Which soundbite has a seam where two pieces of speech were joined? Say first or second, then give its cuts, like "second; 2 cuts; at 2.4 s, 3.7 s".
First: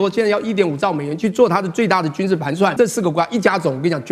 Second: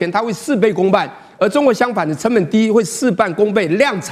first; 1 cut; at 2.7 s